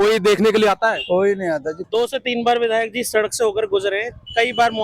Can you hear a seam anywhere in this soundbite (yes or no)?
yes